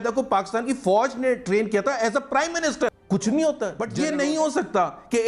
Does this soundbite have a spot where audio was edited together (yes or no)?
yes